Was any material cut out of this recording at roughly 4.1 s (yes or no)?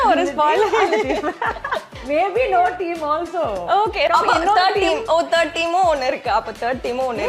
yes